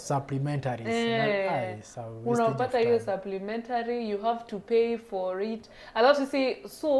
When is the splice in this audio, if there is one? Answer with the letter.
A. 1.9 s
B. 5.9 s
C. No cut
C